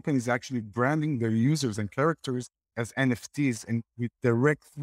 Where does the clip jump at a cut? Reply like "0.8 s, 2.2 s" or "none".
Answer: 2.6 s

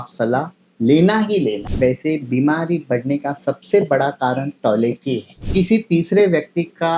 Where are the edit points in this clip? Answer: 1.7 s, 5.4 s

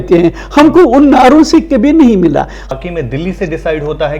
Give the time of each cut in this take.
2.7 s

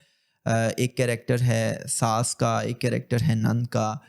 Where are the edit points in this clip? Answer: none

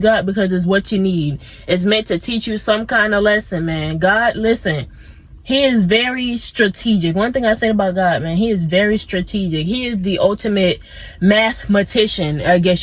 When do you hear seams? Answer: none

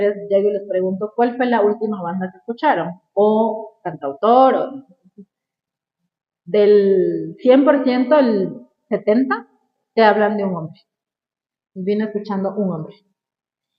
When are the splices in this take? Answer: none

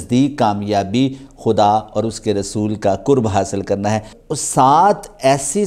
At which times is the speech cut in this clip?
4.2 s

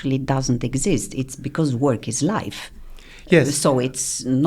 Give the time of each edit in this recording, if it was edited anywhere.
none

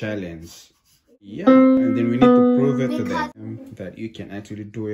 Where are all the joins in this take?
1.5 s, 3.4 s

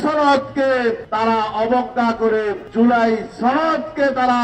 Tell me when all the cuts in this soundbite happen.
1.1 s, 2.6 s

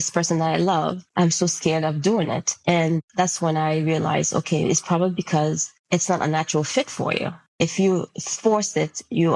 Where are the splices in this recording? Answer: 1.0 s, 2.8 s, 5.7 s, 7.4 s

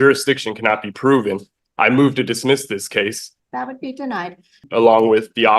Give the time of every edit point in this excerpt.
3.3 s, 4.6 s

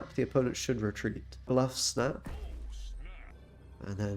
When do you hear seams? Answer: 1.4 s, 3.3 s

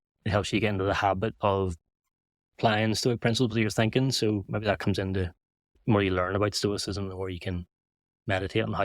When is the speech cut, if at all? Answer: 5.8 s

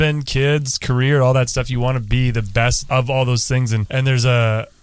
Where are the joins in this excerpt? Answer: 2.8 s, 3.8 s

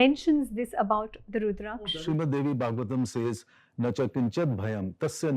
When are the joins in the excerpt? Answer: 1.8 s

